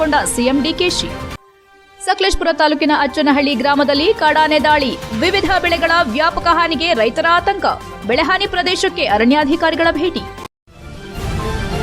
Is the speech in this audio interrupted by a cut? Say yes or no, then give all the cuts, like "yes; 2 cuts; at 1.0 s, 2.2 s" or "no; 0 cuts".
yes; 1 cut; at 10.3 s